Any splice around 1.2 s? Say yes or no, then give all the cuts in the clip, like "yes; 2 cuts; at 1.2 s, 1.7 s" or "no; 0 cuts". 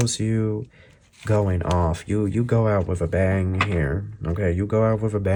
no; 0 cuts